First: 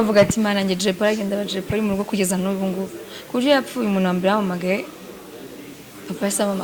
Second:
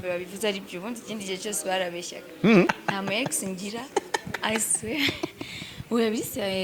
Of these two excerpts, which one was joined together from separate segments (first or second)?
second